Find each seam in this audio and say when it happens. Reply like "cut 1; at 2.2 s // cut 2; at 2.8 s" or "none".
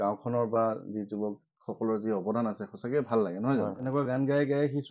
cut 1; at 3.8 s

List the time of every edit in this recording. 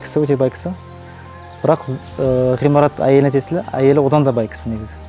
none

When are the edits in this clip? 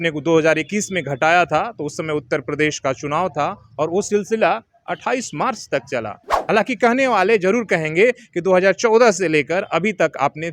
cut 1; at 6.3 s

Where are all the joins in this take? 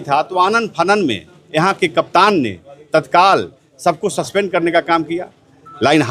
none

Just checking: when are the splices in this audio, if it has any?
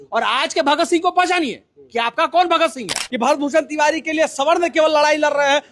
cut 1; at 3.0 s

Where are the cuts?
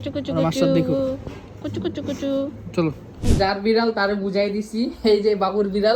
cut 1; at 3.2 s

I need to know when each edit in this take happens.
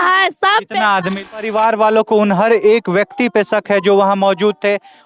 cut 1; at 1.3 s

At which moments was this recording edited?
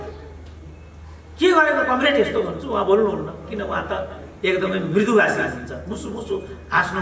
none

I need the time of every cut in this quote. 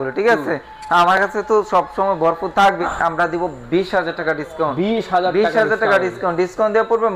cut 1; at 2.9 s

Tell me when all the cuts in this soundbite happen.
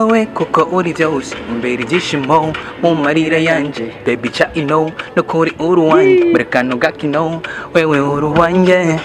none

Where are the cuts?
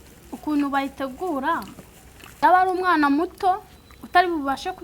cut 1; at 2.4 s

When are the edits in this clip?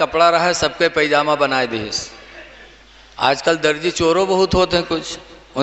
none

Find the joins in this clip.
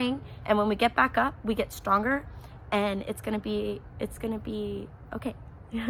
none

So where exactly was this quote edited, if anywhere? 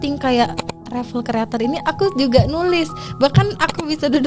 none

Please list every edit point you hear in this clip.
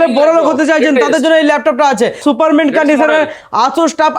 cut 1; at 2.2 s

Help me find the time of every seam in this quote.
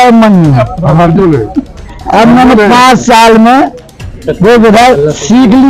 none

